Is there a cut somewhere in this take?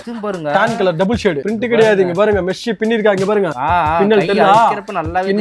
yes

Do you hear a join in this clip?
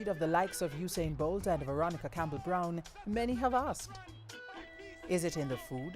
no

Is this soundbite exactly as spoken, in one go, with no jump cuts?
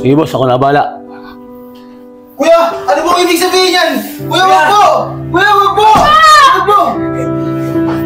no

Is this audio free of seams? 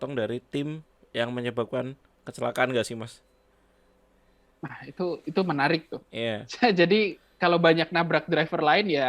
yes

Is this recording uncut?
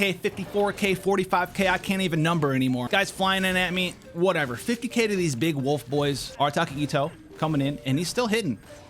no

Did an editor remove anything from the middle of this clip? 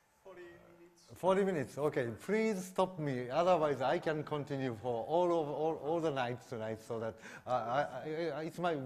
no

